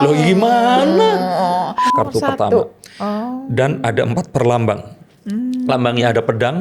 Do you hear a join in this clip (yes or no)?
yes